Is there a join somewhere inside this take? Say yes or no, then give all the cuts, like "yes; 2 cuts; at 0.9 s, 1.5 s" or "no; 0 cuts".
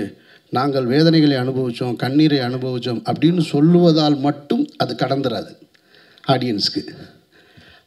no; 0 cuts